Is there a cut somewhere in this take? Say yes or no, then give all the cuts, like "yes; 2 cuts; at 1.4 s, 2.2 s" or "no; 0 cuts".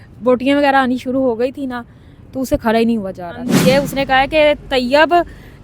yes; 1 cut; at 3.5 s